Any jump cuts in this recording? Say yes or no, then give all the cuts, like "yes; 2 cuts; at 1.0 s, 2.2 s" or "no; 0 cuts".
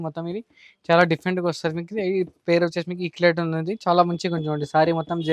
no; 0 cuts